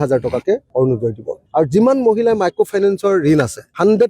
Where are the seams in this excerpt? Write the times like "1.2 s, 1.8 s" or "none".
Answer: 1.3 s

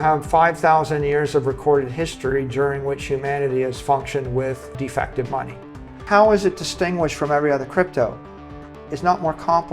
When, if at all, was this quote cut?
4.7 s, 5.9 s

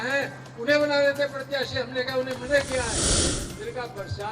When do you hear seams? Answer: 3.4 s

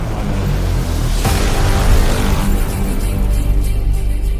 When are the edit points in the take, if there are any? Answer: none

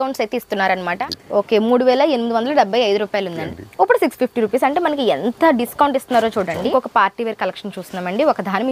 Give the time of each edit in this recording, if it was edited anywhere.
0.9 s, 3.4 s, 6.7 s

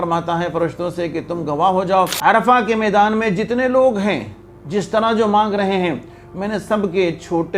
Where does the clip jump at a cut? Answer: 2.1 s

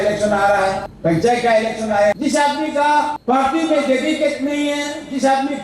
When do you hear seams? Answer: 0.9 s, 2.2 s, 3.2 s

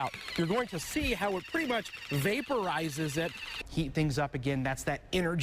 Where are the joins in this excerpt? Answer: 3.6 s

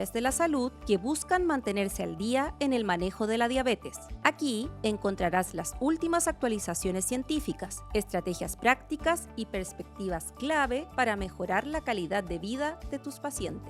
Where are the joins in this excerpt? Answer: none

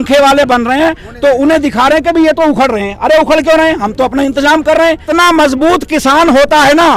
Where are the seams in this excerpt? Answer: 5.1 s

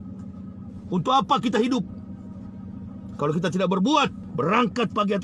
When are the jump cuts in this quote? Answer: 4.2 s

